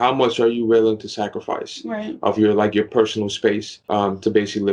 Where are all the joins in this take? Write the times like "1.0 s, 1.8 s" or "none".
none